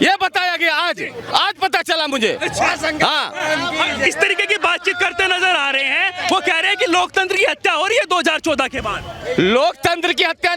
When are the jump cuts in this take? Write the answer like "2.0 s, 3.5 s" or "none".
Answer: none